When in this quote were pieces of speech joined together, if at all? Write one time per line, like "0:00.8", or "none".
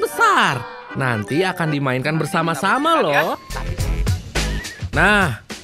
0:03.6